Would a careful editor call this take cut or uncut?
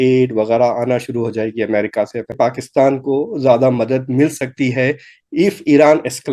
cut